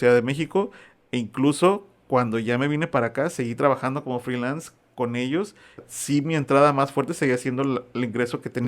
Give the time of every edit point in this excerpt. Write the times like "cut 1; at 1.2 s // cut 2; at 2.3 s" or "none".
cut 1; at 5.9 s